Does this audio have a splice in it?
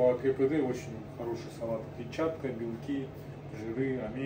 no; 0 cuts

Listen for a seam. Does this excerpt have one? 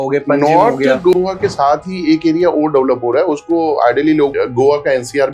yes; 2 cuts; at 1.1 s, 4.3 s

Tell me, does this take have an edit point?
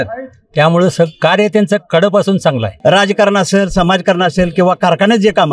yes; 1 cut; at 2.7 s

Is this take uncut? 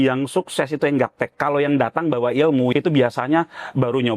no; 1 cut; at 2.7 s

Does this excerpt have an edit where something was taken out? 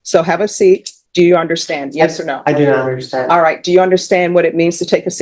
yes; 1 cut; at 1.0 s

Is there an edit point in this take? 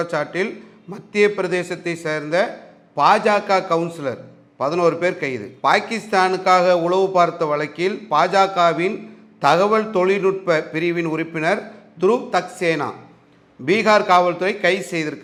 no; 0 cuts

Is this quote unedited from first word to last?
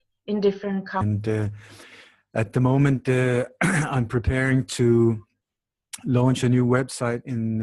yes; 0 cuts

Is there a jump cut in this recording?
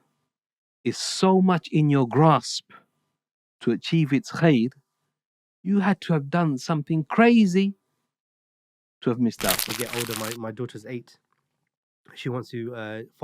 yes; 1 cut; at 9.7 s

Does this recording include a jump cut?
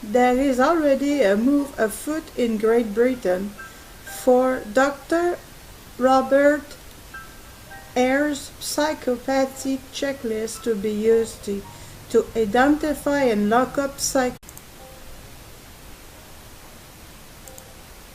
no; 0 cuts

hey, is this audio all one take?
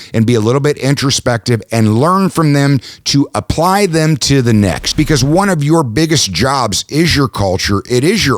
no; 1 cut; at 4.8 s

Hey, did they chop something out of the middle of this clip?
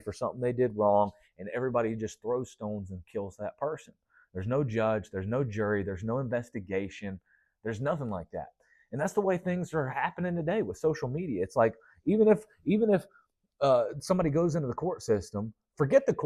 no; 0 cuts

